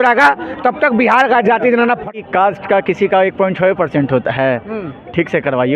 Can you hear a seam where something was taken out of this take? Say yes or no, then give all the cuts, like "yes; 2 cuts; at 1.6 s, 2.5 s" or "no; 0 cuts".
yes; 1 cut; at 2.2 s